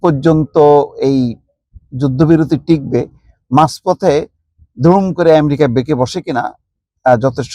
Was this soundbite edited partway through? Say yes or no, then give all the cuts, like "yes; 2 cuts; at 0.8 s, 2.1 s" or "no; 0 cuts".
no; 0 cuts